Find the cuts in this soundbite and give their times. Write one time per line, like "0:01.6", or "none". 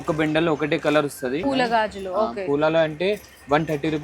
0:01.4